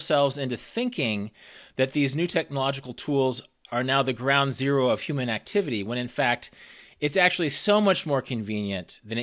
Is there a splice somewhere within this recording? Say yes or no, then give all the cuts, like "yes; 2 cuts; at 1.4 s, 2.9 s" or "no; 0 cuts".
no; 0 cuts